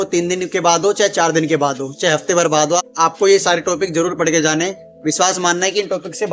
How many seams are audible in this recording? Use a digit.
0